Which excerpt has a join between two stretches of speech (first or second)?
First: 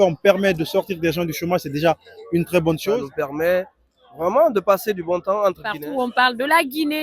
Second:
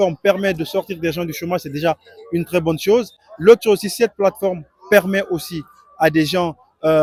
first